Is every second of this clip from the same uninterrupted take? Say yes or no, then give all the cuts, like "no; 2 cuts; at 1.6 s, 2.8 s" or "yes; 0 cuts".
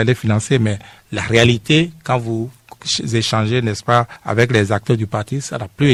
yes; 0 cuts